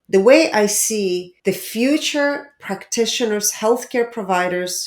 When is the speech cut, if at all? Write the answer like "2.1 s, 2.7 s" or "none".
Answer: 1.3 s